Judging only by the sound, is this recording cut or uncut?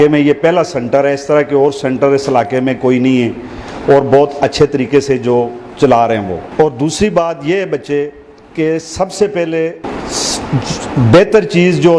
cut